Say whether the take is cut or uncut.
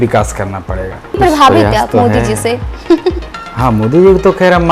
cut